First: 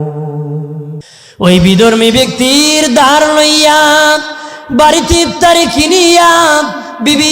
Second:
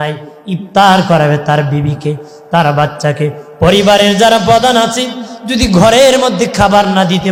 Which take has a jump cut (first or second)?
first